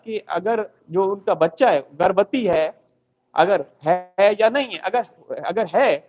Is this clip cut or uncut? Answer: uncut